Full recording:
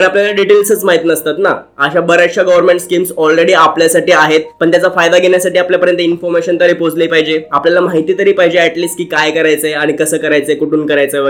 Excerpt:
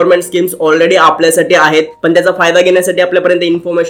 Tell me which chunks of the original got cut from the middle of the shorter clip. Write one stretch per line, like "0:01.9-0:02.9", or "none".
none